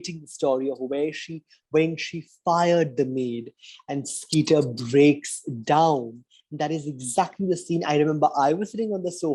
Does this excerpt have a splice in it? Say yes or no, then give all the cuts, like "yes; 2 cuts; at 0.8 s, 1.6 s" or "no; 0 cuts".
no; 0 cuts